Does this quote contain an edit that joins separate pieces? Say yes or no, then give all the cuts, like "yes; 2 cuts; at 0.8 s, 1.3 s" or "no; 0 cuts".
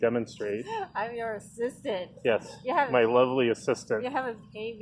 no; 0 cuts